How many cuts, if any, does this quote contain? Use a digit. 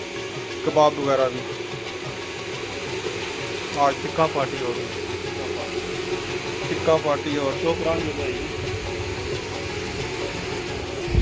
0